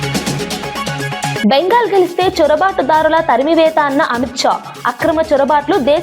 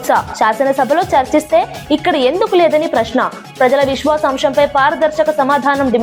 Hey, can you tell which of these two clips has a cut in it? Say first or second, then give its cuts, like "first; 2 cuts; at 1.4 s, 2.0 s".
first; 1 cut; at 1.4 s